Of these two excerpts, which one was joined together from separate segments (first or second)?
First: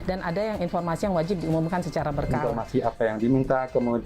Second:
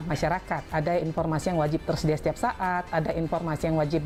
first